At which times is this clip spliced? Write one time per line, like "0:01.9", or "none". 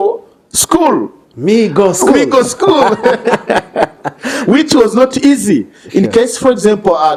none